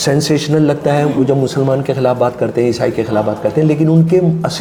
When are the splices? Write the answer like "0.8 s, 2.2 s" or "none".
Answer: none